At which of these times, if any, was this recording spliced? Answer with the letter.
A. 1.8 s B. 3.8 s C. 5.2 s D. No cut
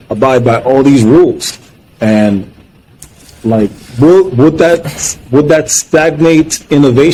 D